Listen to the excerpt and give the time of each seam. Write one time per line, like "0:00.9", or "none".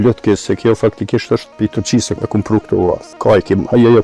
0:01.6
0:03.1